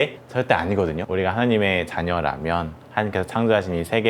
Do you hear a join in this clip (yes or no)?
yes